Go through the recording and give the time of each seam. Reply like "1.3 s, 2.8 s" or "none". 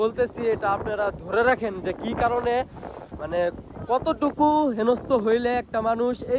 none